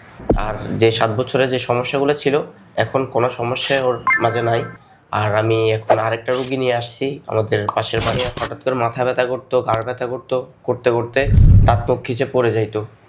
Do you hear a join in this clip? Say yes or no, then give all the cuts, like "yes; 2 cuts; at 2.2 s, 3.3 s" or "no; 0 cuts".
yes; 1 cut; at 8.2 s